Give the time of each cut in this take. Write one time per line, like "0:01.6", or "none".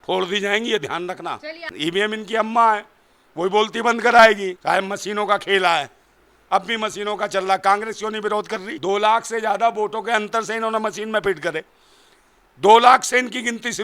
0:01.7
0:04.5
0:08.6